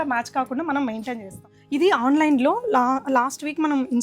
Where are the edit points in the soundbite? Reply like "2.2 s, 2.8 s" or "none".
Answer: 1.5 s

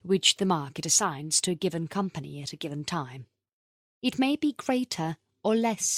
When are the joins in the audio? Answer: 1.0 s

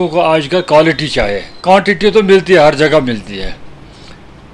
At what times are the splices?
1.5 s

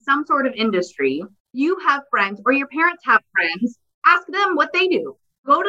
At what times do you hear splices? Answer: 1.5 s, 3.9 s

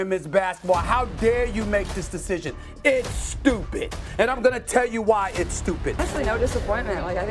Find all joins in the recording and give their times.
6.0 s

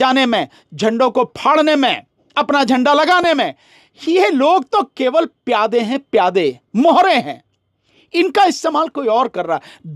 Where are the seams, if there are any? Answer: none

